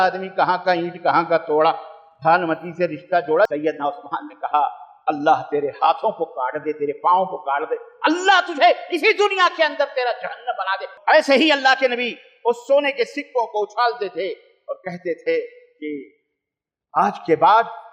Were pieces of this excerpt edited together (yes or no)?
yes